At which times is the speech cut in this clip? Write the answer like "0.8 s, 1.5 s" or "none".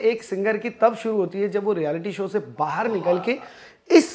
none